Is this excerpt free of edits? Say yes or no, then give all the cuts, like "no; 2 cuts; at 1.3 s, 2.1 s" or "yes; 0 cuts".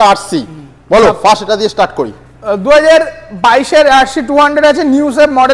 yes; 0 cuts